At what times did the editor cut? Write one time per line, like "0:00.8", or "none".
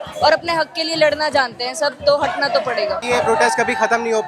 0:03.1